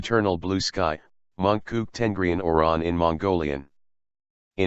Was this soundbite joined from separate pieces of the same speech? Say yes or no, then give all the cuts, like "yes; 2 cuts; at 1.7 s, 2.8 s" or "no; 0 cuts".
yes; 1 cut; at 1.5 s